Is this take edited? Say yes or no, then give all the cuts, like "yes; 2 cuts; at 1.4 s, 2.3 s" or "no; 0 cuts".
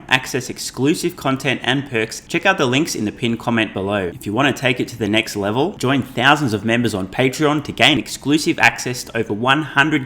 yes; 2 cuts; at 2.2 s, 4.2 s